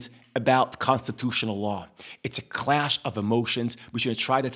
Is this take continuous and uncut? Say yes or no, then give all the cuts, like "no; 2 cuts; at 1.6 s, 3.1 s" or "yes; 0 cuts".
yes; 0 cuts